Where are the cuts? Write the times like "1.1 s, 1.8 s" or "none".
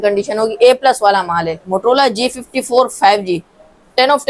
1.6 s